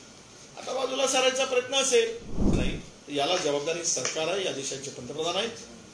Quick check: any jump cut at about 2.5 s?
yes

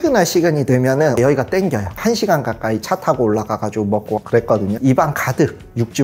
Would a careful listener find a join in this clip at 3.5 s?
no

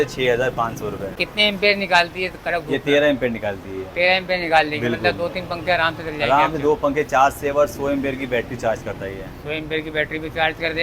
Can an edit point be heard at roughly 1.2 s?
yes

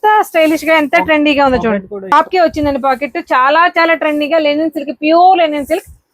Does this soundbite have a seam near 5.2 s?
no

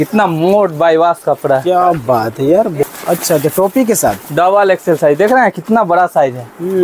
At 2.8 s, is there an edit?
yes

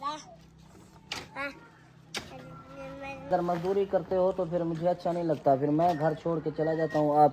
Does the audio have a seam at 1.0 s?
no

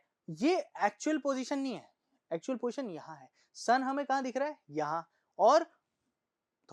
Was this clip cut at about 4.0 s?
no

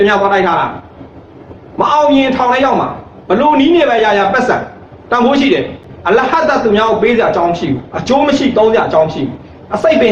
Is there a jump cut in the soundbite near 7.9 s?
no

